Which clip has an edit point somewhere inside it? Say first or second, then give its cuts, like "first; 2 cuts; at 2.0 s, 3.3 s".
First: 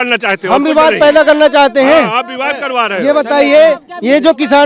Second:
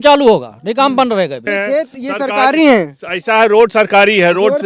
second; 1 cut; at 1.4 s